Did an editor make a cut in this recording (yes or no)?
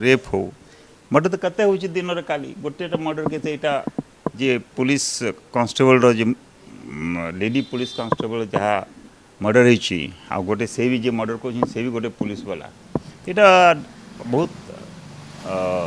no